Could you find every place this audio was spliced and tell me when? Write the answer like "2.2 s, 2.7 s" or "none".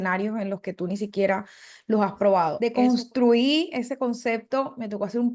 2.6 s